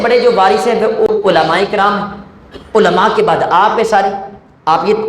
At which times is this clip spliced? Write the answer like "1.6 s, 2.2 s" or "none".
1.1 s